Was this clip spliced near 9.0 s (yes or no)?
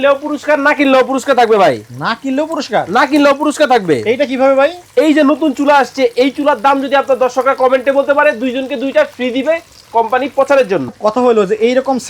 no